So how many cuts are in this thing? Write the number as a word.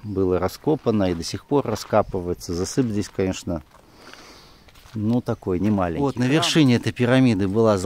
one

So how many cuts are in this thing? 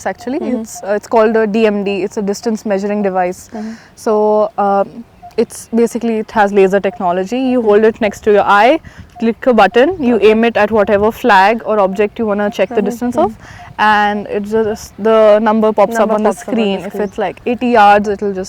zero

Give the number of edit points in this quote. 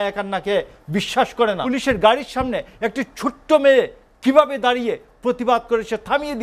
one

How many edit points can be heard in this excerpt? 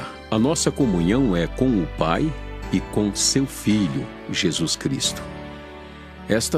one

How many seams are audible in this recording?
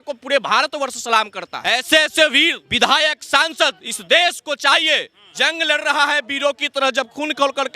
three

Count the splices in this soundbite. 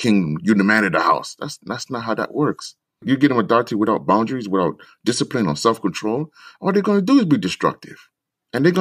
one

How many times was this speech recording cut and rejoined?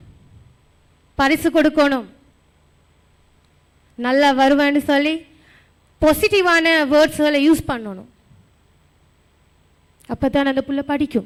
zero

